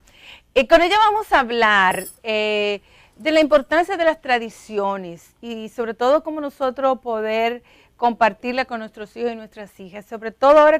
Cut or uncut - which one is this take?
cut